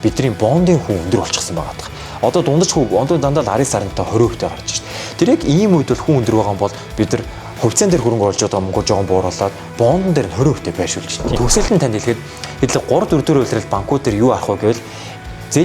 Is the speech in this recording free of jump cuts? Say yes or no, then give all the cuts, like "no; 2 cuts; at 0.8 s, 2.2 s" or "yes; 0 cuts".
no; 1 cut; at 11.3 s